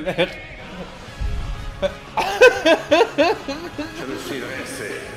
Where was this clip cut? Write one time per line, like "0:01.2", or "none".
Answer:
none